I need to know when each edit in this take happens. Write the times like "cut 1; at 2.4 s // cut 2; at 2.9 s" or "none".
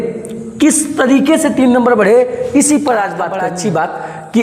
cut 1; at 3.4 s